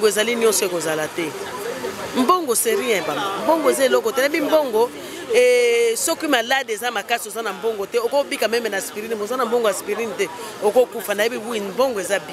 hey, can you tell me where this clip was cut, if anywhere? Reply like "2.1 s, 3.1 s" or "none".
none